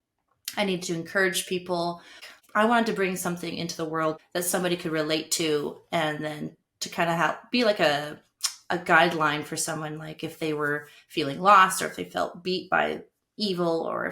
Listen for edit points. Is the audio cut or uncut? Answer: cut